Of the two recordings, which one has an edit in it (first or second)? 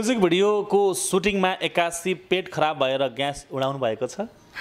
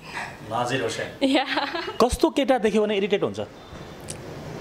second